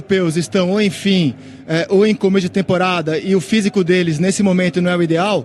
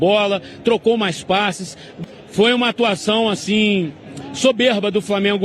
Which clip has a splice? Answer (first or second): second